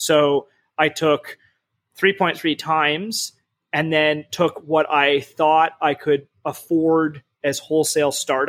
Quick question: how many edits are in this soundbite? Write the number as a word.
zero